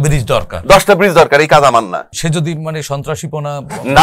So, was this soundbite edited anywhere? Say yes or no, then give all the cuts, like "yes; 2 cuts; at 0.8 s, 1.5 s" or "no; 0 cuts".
yes; 1 cut; at 2.2 s